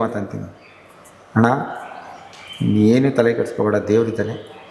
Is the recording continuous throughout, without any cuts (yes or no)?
yes